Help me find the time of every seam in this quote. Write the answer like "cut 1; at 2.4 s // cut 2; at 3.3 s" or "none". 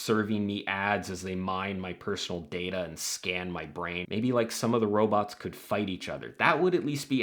cut 1; at 4.0 s